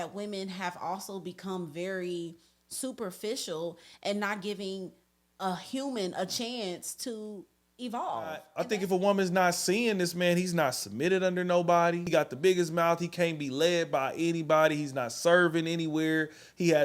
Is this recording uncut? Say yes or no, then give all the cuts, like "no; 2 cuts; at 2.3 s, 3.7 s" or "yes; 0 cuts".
no; 2 cuts; at 8.5 s, 12.1 s